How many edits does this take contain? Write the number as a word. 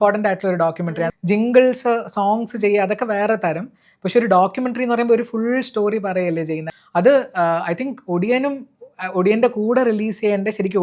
two